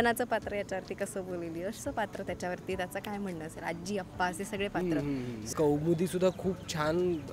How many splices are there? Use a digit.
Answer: 1